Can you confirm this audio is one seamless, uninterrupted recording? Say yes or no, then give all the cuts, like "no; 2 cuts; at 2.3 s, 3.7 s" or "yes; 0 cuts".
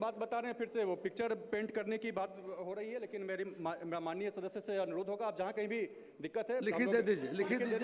yes; 0 cuts